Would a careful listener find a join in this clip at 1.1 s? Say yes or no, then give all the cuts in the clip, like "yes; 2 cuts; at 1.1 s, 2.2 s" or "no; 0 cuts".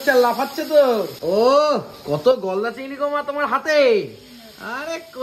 yes; 1 cut; at 1.1 s